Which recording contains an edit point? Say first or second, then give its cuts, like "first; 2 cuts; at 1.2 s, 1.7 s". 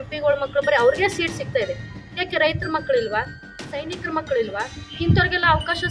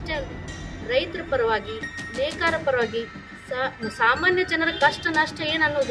first; 1 cut; at 4.8 s